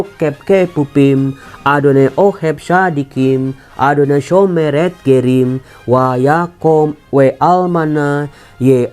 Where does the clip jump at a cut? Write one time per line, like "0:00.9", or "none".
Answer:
0:07.0